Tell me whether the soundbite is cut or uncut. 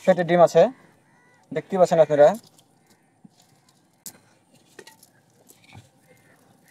uncut